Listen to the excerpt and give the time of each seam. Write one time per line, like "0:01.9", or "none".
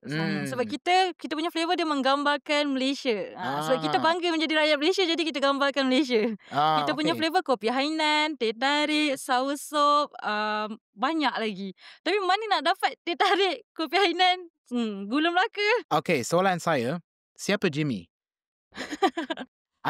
0:15.8